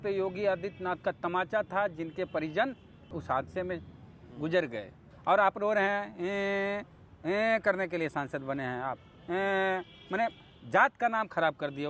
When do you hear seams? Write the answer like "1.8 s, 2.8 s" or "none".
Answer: 3.2 s, 5.0 s